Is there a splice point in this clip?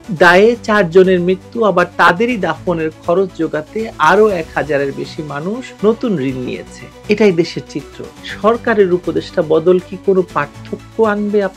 yes; 1 cut; at 8.2 s

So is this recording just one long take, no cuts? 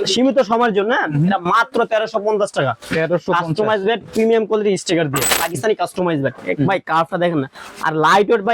no; 1 cut; at 5.3 s

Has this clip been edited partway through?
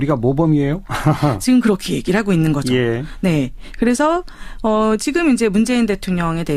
no; 0 cuts

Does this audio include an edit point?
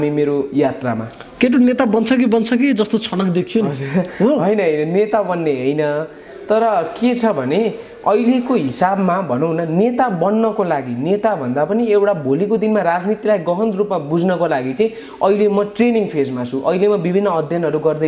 no; 0 cuts

